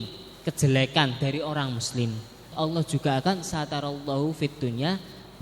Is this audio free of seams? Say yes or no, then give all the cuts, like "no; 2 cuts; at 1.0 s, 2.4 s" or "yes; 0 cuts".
no; 1 cut; at 2.5 s